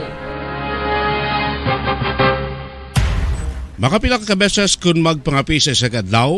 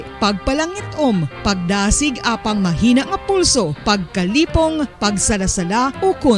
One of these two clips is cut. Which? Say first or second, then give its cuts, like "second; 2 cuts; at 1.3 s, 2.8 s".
first; 1 cut; at 2.8 s